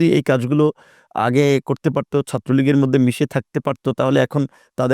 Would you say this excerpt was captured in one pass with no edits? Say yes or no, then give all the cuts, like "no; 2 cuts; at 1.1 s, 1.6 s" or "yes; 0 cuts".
yes; 0 cuts